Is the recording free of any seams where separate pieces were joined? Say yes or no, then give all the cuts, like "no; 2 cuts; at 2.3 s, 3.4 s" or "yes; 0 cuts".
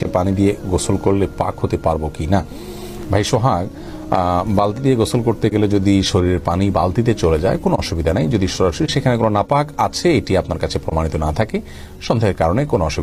yes; 0 cuts